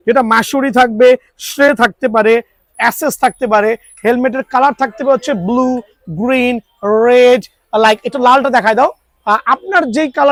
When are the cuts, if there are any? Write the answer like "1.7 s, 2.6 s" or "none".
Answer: none